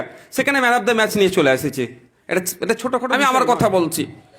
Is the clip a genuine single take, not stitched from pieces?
no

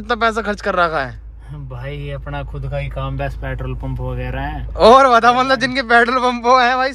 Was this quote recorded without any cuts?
yes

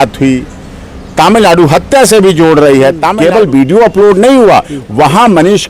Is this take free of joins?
no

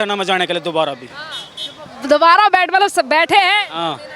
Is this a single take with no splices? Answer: yes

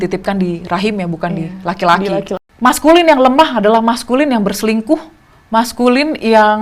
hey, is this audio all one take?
no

